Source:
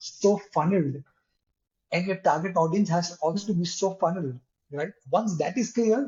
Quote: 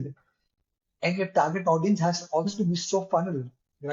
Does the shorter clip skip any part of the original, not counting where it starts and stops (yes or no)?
no